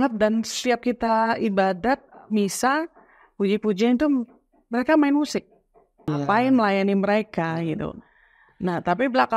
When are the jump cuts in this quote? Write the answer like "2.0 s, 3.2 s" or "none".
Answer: 6.1 s